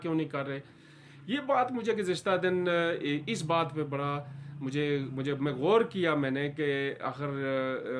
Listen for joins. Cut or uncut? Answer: uncut